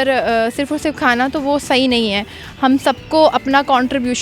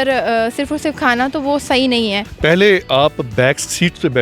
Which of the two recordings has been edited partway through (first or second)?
second